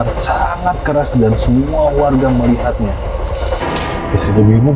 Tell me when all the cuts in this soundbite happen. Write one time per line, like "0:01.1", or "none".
0:03.6